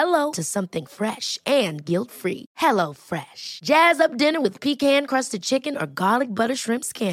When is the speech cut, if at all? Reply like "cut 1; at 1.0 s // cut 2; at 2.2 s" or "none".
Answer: none